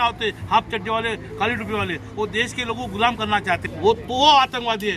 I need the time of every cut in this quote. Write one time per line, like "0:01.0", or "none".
0:03.7